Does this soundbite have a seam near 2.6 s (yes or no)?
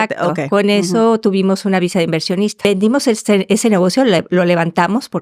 yes